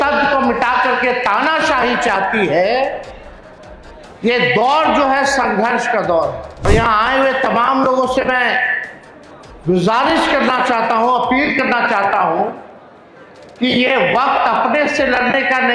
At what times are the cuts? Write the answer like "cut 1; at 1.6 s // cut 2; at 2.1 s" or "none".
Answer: cut 1; at 6.7 s